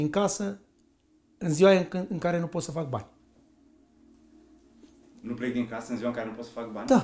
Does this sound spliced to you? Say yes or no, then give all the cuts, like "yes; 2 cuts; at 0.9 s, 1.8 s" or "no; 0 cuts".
yes; 2 cuts; at 3.6 s, 5.2 s